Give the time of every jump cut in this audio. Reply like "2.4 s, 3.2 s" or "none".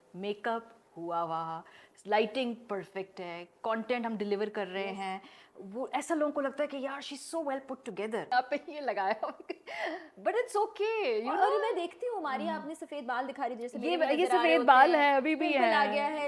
8.3 s